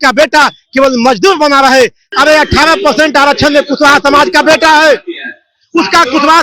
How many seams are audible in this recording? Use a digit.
1